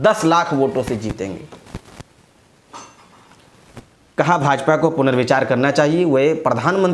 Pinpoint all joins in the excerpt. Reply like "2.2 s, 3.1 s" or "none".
none

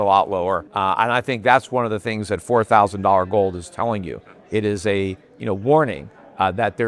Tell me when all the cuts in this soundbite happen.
none

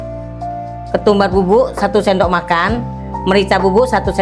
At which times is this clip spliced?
0.9 s

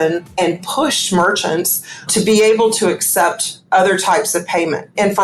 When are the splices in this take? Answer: none

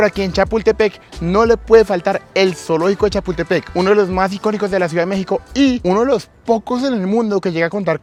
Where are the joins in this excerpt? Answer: none

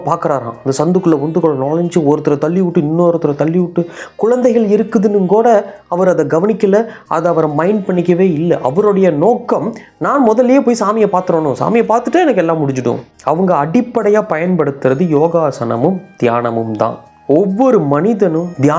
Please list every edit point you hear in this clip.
13.1 s

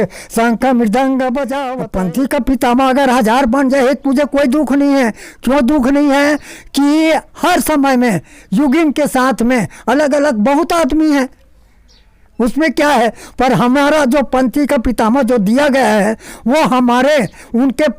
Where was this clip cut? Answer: 1.6 s

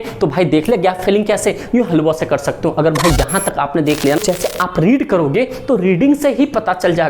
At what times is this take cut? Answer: 4.2 s

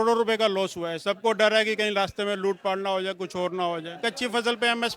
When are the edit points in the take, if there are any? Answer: 1.0 s, 4.0 s

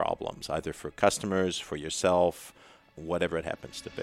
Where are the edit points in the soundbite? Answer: 2.9 s

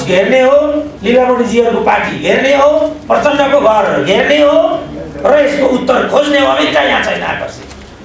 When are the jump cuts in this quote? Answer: 0.9 s, 3.0 s

